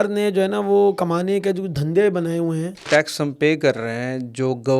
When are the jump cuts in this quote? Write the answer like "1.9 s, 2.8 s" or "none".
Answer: 2.9 s